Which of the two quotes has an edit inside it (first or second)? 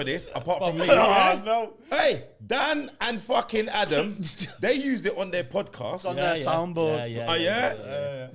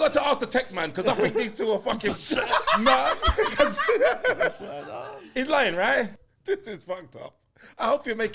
second